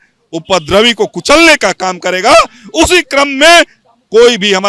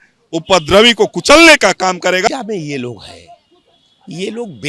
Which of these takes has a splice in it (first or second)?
second